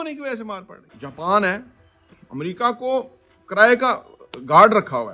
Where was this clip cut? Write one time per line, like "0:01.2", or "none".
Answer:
0:01.0